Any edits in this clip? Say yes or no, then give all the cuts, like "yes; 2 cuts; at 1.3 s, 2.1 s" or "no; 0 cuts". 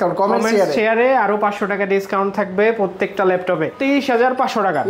yes; 1 cut; at 3.7 s